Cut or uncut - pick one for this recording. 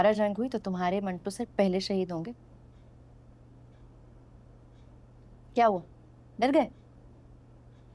uncut